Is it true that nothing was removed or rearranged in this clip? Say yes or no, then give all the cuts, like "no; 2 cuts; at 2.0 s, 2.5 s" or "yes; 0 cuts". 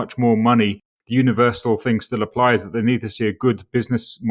yes; 0 cuts